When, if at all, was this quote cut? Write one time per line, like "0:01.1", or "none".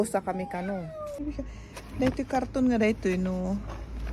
0:01.2